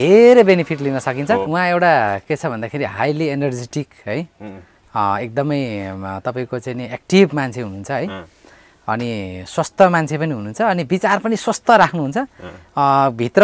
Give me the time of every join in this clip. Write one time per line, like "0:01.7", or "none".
0:01.5